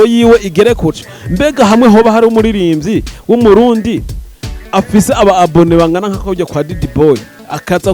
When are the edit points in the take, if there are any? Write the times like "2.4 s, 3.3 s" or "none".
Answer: 0.9 s